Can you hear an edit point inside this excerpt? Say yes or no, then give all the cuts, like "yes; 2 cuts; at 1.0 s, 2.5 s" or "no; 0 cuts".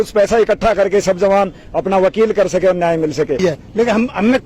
yes; 1 cut; at 3.4 s